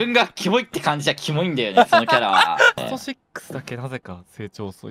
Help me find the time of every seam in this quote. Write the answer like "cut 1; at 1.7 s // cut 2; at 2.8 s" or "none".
cut 1; at 2.8 s